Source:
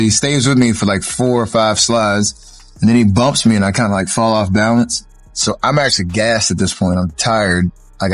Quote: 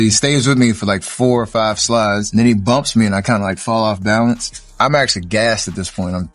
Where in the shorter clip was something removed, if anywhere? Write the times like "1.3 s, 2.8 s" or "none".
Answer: 2.2 s, 4.7 s